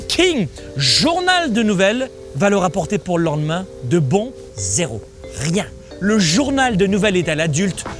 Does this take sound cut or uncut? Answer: cut